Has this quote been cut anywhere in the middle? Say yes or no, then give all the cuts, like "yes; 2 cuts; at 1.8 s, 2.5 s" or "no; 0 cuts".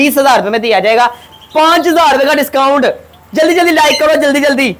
no; 0 cuts